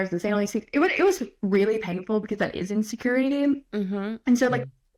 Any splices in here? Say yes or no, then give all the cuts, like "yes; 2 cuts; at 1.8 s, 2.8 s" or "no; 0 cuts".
no; 0 cuts